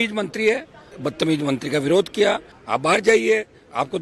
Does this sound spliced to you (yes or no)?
yes